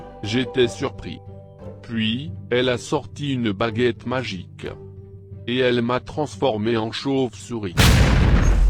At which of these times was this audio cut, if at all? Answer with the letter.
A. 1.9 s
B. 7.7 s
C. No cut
B